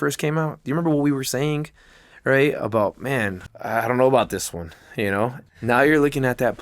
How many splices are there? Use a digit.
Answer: 2